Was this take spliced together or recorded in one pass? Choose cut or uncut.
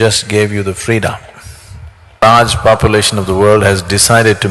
cut